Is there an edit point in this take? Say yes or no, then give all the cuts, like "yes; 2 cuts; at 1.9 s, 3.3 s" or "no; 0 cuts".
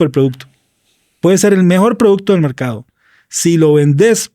no; 0 cuts